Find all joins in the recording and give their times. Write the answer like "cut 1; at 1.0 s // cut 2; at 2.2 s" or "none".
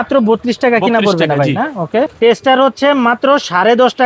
cut 1; at 2.1 s